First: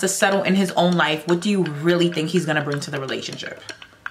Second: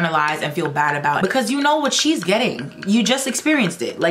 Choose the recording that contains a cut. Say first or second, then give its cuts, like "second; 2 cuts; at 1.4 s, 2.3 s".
second; 1 cut; at 1.2 s